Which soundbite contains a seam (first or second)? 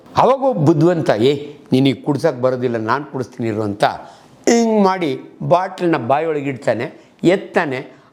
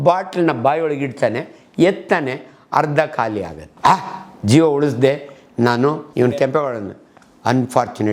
second